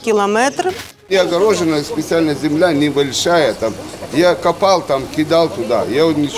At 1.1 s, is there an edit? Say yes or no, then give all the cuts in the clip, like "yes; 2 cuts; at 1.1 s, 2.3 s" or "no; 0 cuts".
yes; 1 cut; at 1.1 s